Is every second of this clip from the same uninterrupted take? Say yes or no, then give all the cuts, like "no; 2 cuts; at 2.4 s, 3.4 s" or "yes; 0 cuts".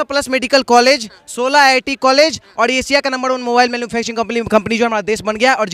yes; 0 cuts